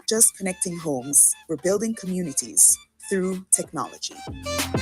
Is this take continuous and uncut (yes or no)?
yes